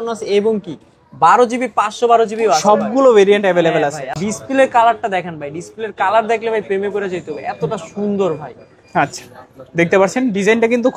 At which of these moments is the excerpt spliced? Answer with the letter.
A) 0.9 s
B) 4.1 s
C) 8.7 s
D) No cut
B